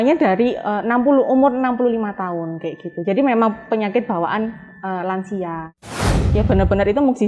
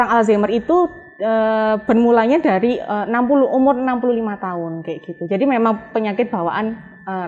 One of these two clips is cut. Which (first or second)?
first